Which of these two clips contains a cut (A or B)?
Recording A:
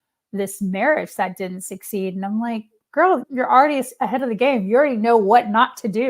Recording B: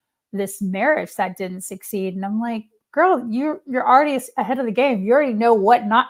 A